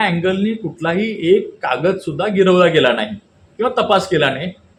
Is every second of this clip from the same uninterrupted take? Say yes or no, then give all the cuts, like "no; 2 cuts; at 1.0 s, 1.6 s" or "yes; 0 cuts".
yes; 0 cuts